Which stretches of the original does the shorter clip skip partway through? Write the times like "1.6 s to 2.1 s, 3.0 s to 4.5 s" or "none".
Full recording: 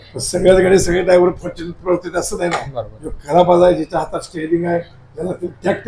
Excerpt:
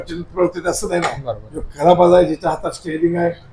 none